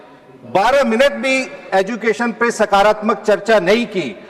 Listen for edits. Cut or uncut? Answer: uncut